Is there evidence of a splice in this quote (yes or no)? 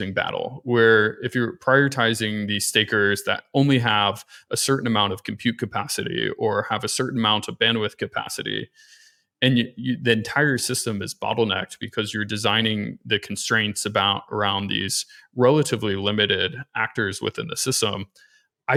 no